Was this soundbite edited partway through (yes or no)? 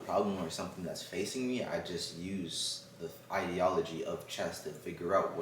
no